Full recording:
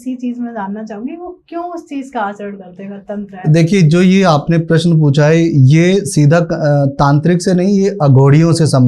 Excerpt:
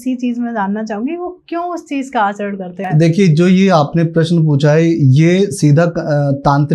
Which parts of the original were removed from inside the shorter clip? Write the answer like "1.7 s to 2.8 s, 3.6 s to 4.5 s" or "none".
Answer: 2.8 s to 3.3 s